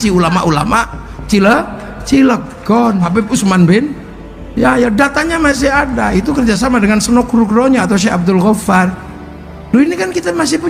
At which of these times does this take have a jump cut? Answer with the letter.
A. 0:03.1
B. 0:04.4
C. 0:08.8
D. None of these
A